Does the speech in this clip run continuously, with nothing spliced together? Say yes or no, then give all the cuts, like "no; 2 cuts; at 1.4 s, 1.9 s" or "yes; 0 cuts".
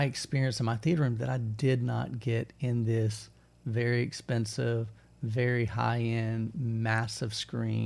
yes; 0 cuts